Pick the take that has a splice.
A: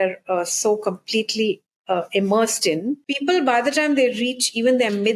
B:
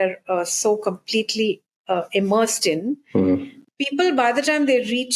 A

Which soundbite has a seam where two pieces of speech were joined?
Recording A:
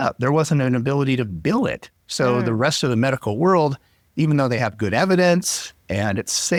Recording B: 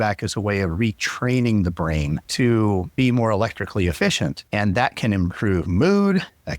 B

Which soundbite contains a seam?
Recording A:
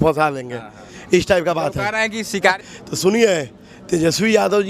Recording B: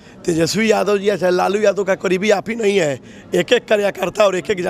A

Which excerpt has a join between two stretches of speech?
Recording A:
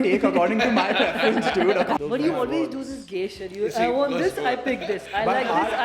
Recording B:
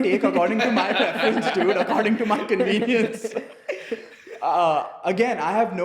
A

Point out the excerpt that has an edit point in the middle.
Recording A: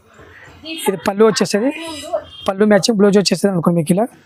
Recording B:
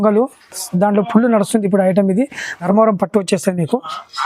B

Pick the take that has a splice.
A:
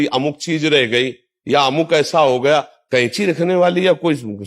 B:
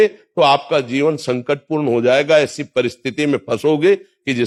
A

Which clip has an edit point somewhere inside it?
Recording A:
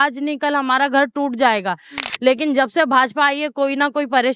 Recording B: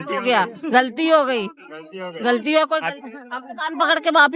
A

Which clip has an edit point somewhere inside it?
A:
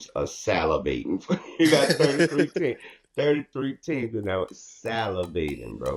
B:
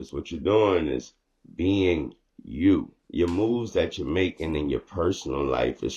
B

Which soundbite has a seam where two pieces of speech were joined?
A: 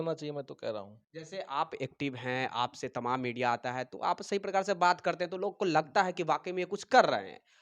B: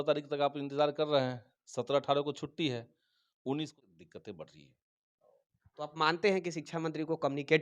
B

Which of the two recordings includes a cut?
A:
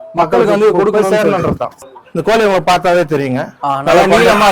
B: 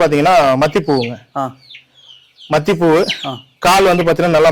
A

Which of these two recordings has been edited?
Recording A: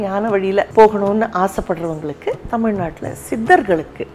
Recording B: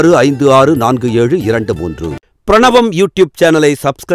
B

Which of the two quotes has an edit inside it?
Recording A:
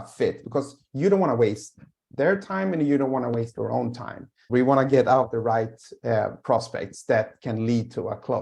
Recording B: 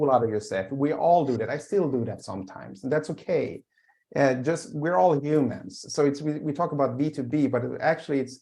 A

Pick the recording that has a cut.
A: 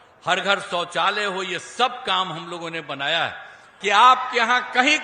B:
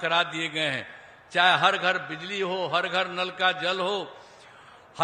A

